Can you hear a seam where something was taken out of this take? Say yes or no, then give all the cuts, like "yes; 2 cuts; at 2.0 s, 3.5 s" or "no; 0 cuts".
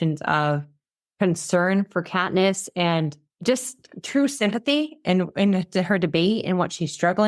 yes; 1 cut; at 3.3 s